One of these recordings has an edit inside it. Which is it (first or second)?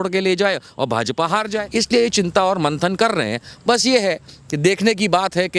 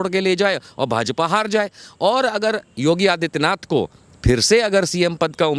first